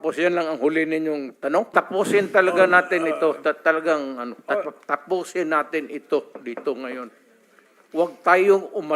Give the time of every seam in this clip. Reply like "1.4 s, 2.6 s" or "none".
1.7 s